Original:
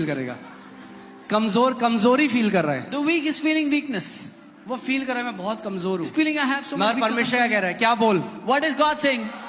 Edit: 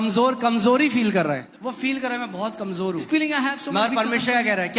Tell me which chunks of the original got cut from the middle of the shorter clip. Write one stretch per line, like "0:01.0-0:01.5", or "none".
0:02.8-0:04.5